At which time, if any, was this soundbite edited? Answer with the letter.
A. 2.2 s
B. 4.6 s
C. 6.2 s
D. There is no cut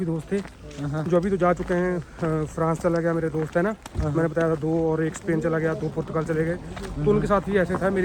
D